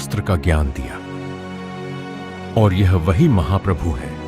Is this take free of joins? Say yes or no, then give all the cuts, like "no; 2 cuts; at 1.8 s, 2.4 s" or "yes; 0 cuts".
no; 2 cuts; at 0.9 s, 2.5 s